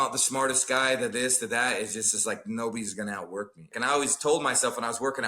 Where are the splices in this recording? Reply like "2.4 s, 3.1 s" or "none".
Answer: 3.7 s

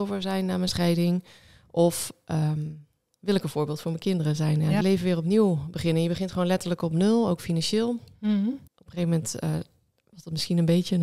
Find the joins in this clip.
4.8 s, 8.7 s

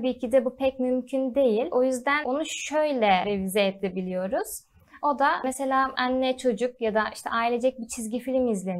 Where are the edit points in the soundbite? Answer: 2.0 s, 3.2 s, 5.6 s

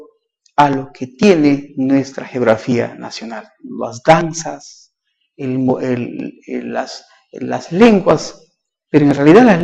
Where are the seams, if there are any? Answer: 6.4 s

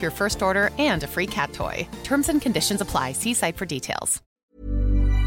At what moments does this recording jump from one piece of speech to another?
4.2 s

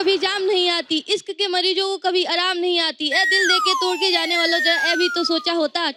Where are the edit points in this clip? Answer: none

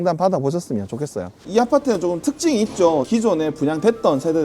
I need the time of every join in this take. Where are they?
1.4 s

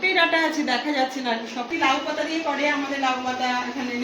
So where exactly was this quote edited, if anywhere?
1.7 s

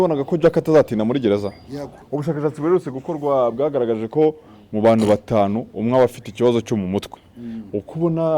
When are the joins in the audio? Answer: 2.0 s

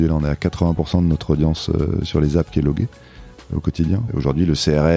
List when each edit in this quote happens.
3.7 s

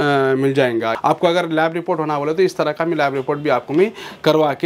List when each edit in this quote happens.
1.0 s

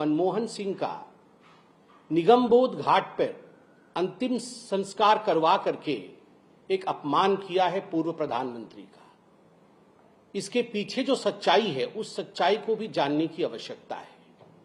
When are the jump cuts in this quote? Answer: none

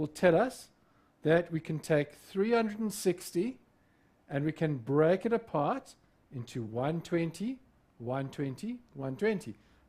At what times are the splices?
4.3 s

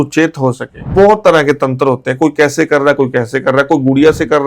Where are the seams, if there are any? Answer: 0.9 s

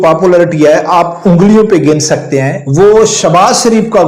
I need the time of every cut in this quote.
2.6 s

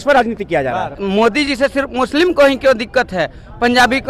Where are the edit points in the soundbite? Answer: 1.0 s

